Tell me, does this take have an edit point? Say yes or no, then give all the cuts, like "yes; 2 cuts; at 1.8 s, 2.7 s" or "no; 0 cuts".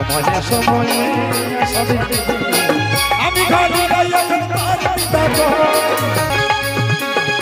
yes; 1 cut; at 6.3 s